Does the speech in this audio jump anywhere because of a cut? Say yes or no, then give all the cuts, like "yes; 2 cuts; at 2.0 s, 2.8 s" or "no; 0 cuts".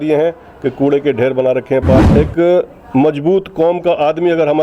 yes; 1 cut; at 2.1 s